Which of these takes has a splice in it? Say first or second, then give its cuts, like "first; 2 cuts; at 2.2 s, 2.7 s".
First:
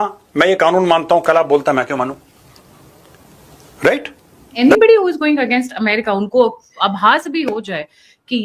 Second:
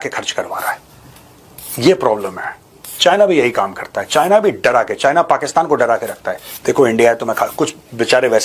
first; 1 cut; at 4.5 s